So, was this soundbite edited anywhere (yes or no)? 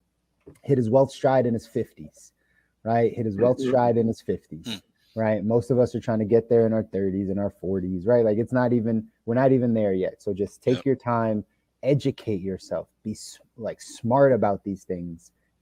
no